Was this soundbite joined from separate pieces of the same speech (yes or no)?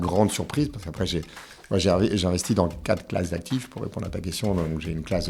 no